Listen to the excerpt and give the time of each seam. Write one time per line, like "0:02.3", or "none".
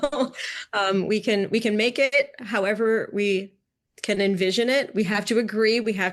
none